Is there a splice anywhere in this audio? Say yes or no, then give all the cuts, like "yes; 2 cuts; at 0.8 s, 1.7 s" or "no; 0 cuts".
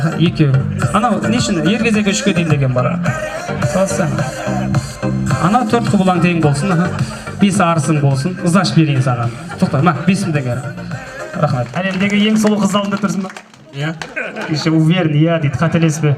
yes; 1 cut; at 11.9 s